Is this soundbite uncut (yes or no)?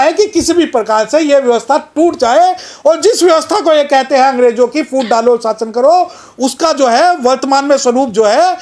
yes